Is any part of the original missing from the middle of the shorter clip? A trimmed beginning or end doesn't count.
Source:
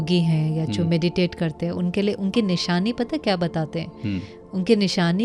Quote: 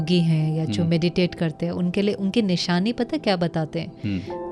no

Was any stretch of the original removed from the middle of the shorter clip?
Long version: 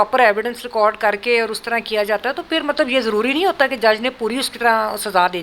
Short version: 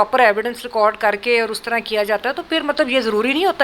no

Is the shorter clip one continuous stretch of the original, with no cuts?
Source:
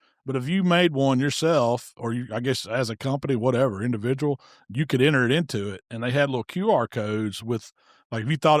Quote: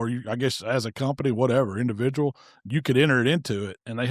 yes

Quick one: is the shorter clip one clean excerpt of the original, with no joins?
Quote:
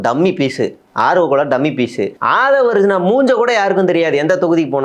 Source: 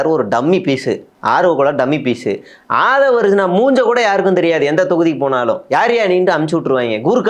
no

